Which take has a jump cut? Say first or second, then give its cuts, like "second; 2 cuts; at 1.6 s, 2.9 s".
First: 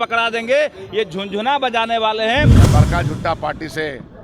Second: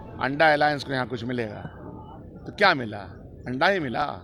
first; 1 cut; at 2.6 s